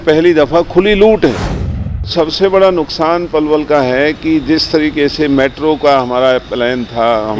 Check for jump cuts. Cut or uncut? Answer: cut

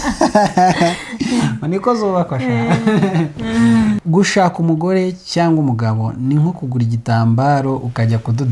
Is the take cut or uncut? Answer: cut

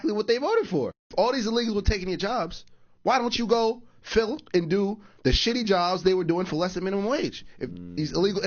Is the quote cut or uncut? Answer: uncut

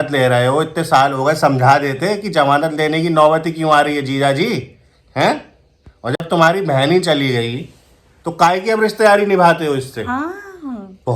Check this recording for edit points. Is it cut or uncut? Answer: uncut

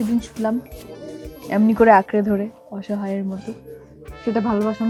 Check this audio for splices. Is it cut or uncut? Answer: uncut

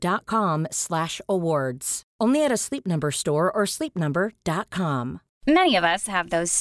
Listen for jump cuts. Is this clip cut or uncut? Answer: uncut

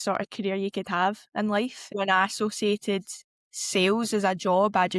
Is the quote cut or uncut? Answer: cut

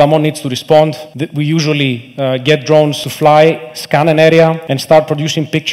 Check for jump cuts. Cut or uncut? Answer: cut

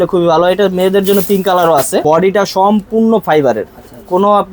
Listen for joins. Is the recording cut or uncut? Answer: cut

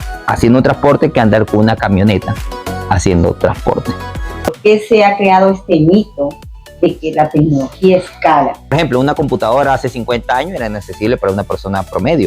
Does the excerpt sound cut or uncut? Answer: cut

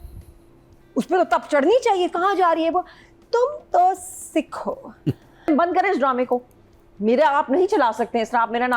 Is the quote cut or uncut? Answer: cut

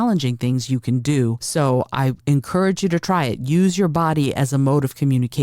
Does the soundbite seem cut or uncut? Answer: cut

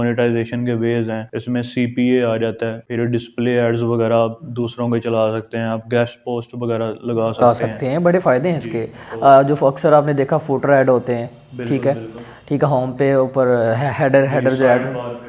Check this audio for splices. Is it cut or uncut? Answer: cut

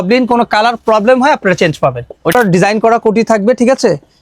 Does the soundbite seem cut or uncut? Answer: cut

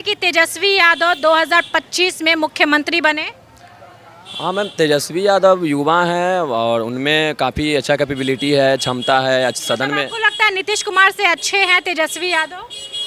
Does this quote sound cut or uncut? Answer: uncut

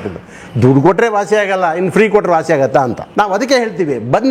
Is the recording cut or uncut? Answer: cut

